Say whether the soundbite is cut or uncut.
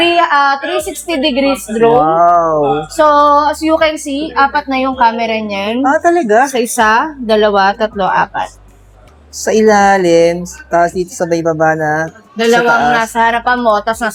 uncut